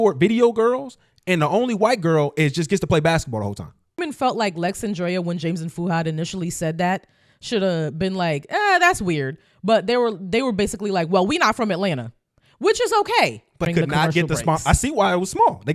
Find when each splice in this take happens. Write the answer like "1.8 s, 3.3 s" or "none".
4.0 s, 13.7 s